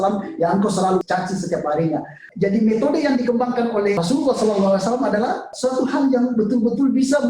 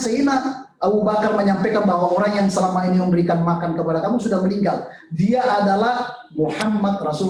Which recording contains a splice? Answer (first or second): first